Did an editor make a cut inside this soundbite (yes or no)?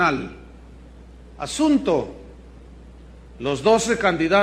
no